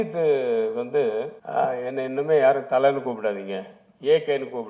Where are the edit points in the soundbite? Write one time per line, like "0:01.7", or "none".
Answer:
0:01.4